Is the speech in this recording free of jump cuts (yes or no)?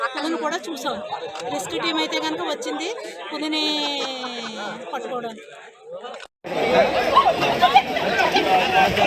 yes